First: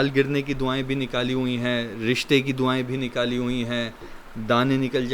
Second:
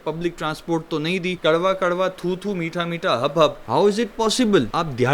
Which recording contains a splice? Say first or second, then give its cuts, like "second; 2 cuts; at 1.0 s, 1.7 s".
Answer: second; 2 cuts; at 1.4 s, 3.6 s